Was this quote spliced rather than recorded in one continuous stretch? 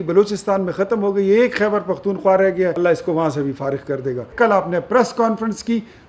yes; 2 cuts; at 2.8 s, 4.3 s

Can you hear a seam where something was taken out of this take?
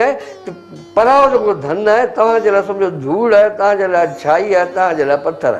no; 0 cuts

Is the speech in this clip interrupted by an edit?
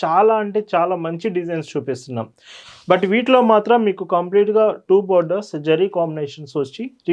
yes; 1 cut; at 2.5 s

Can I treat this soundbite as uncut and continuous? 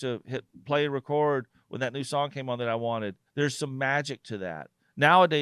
no; 1 cut; at 3.2 s

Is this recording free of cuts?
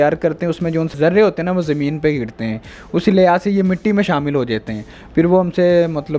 no; 1 cut; at 0.9 s

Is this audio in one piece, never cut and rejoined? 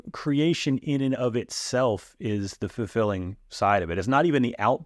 yes; 0 cuts

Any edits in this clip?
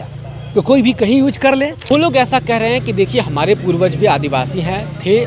yes; 1 cut; at 1.8 s

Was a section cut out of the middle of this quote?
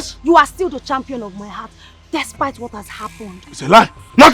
no; 0 cuts

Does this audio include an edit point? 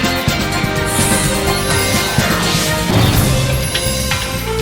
no; 0 cuts

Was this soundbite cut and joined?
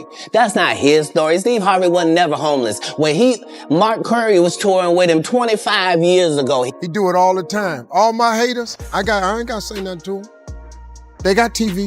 yes; 1 cut; at 6.7 s

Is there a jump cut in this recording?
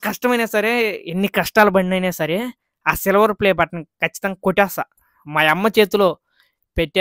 no; 0 cuts

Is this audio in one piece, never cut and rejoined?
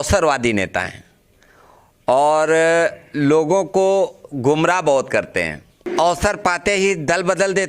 no; 1 cut; at 5.8 s

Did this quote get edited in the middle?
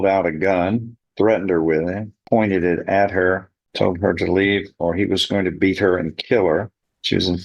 no; 0 cuts

